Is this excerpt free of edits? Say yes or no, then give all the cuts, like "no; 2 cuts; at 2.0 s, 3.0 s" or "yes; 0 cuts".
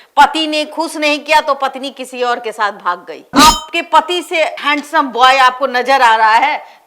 no; 1 cut; at 3.4 s